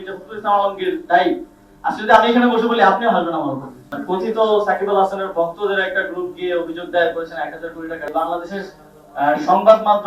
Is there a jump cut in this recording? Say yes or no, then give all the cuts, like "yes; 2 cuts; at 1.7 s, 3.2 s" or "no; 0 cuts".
yes; 2 cuts; at 3.9 s, 8.1 s